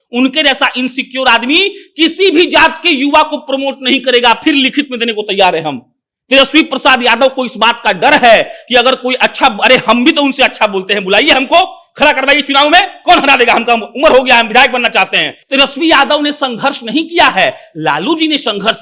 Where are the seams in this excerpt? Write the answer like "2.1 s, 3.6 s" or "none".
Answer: 15.3 s